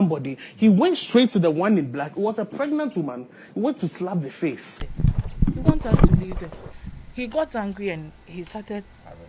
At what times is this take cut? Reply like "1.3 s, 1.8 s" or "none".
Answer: 4.9 s